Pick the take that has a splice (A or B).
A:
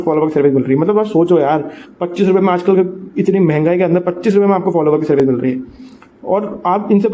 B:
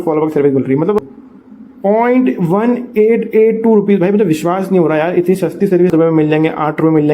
B